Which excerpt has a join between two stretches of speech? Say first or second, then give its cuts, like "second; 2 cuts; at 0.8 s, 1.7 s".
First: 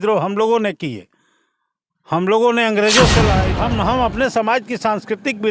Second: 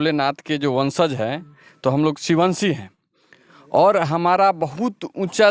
first; 1 cut; at 3.5 s